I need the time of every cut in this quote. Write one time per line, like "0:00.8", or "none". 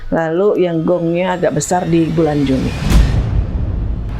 0:02.8